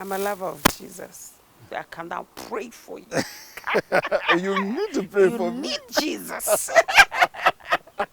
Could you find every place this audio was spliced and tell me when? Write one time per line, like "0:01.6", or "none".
0:01.7